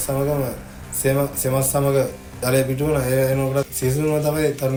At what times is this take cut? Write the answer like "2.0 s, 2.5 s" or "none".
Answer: none